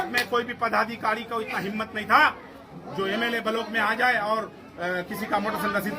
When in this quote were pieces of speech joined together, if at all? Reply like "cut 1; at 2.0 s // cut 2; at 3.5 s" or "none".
none